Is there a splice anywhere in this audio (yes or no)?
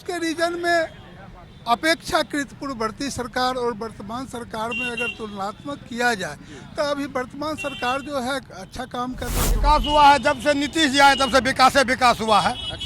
yes